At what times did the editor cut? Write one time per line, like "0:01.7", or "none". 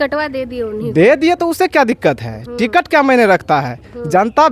none